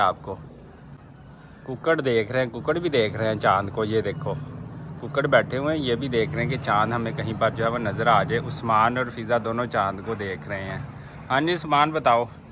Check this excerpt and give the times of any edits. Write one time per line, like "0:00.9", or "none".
none